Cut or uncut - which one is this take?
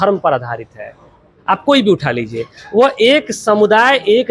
uncut